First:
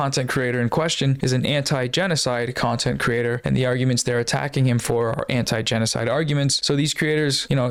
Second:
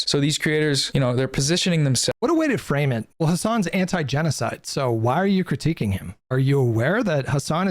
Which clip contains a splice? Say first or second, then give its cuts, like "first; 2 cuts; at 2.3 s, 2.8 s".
second; 3 cuts; at 2.2 s, 3.1 s, 6.1 s